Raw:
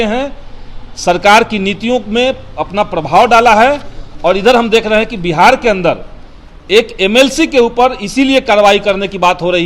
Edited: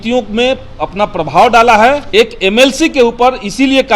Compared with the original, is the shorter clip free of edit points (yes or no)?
no